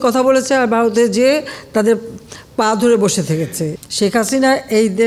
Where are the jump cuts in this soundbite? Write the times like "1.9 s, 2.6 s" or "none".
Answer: 3.7 s